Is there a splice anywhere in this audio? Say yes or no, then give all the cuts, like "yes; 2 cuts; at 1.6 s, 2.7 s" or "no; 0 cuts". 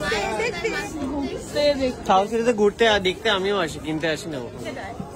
no; 0 cuts